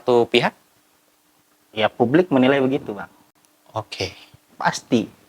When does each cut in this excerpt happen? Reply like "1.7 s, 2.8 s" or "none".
none